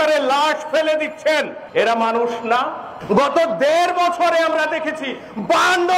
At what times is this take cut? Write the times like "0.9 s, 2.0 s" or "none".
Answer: 1.6 s, 2.9 s